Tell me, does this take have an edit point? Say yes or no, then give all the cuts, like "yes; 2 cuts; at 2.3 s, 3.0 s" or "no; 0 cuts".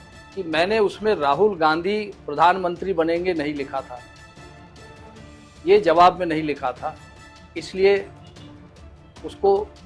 yes; 2 cuts; at 4.0 s, 5.6 s